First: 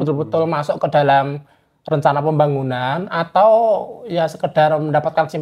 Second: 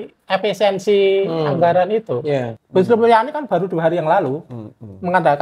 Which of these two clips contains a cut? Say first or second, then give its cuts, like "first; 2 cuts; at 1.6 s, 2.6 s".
second; 1 cut; at 2.6 s